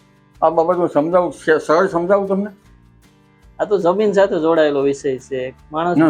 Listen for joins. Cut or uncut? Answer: uncut